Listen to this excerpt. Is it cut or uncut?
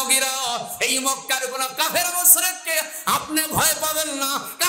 uncut